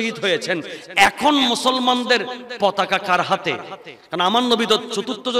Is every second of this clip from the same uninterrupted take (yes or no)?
yes